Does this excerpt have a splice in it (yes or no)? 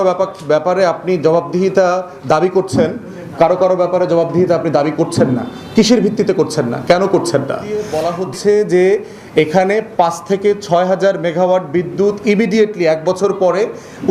yes